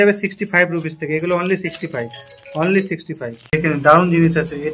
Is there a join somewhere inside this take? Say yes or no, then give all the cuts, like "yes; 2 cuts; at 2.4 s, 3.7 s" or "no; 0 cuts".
yes; 1 cut; at 3.6 s